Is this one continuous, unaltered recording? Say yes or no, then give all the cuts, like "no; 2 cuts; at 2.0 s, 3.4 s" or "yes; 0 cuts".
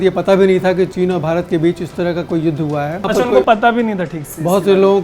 no; 2 cuts; at 0.9 s, 3.0 s